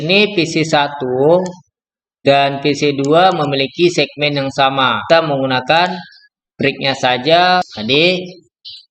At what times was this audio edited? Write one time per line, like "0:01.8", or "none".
0:05.0
0:07.7